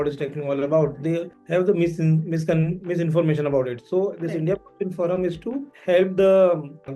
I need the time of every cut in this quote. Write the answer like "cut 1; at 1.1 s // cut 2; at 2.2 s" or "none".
none